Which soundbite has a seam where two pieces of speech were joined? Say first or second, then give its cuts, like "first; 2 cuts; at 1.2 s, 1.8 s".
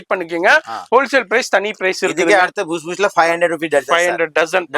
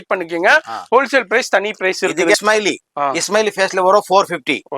second; 1 cut; at 2.3 s